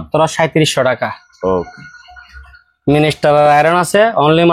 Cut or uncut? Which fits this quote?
uncut